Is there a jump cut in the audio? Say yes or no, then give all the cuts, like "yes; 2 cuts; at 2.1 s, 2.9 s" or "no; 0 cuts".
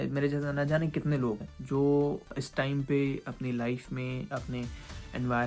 yes; 3 cuts; at 1.5 s, 2.3 s, 4.3 s